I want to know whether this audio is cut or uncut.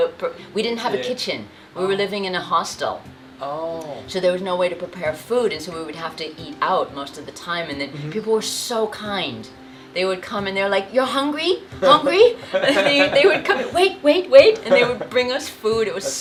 uncut